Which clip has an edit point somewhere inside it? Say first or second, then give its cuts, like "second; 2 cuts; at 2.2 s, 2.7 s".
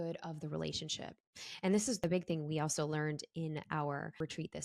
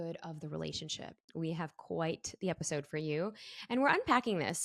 second; 1 cut; at 1.3 s